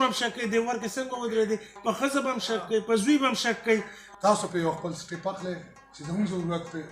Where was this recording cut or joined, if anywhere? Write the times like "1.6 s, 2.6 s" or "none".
4.0 s